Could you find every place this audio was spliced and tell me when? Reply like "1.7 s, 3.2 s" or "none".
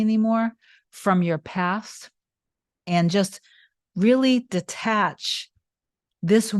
2.8 s